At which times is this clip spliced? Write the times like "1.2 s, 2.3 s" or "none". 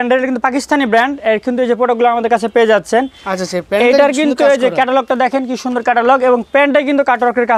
none